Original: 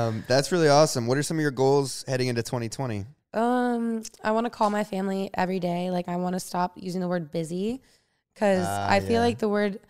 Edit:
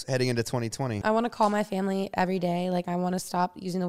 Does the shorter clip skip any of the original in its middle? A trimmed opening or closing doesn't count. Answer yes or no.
yes